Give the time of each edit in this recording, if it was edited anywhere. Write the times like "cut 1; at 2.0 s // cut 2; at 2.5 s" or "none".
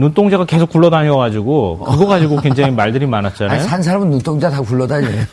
cut 1; at 3.9 s

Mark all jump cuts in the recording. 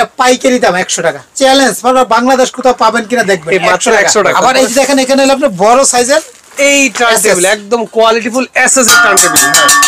cut 1; at 1.3 s // cut 2; at 4.3 s

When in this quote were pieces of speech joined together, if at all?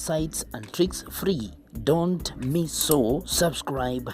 cut 1; at 2.7 s

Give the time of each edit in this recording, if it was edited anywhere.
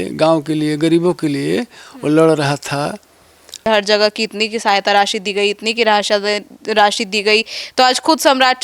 cut 1; at 3.7 s

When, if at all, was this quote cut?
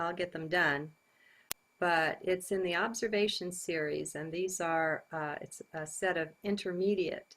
cut 1; at 5.0 s

